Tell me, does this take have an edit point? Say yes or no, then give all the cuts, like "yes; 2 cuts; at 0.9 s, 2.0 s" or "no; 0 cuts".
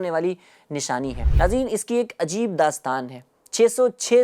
yes; 1 cut; at 1.2 s